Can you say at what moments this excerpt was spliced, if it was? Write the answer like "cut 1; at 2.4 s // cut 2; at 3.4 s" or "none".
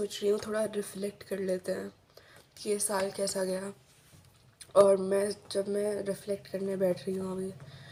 none